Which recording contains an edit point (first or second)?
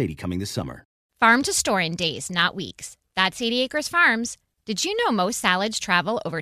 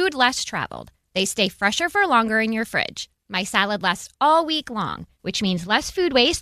first